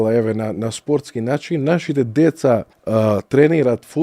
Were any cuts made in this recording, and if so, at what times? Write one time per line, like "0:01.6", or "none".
0:02.8